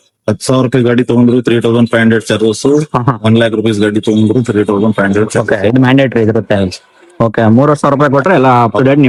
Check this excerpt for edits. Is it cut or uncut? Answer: uncut